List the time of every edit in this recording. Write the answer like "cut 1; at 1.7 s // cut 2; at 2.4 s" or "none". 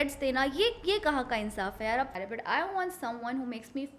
cut 1; at 2.1 s